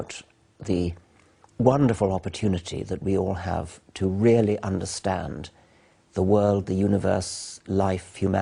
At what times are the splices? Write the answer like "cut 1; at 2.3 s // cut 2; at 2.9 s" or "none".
none